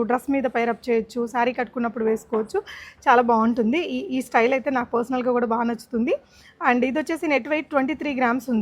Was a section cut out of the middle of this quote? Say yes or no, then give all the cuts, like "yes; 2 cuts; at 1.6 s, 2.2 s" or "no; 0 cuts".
no; 0 cuts